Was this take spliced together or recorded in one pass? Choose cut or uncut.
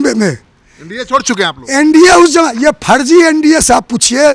uncut